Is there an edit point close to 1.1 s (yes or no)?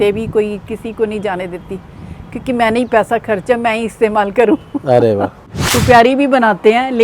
no